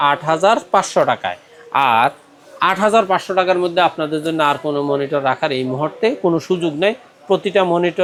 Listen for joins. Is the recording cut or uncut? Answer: uncut